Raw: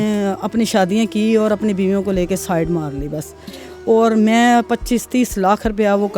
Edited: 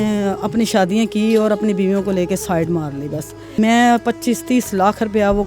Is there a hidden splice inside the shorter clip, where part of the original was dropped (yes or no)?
yes